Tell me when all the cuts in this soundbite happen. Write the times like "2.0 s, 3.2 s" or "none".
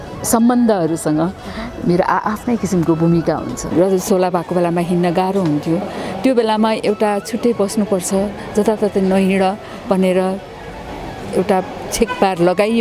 3.6 s